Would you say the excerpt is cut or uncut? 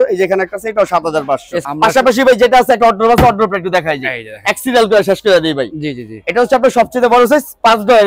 uncut